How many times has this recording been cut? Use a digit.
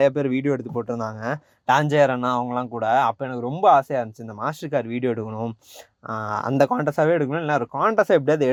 0